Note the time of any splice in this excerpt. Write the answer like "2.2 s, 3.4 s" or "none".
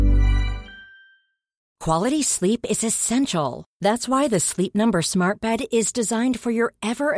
1.7 s